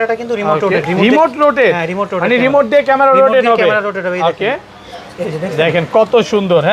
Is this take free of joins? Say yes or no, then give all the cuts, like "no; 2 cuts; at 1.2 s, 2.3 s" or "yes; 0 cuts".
yes; 0 cuts